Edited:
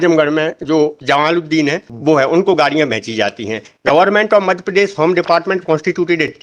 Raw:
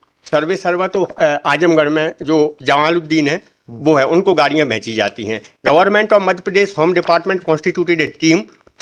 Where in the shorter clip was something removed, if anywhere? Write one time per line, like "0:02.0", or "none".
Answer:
0:01.9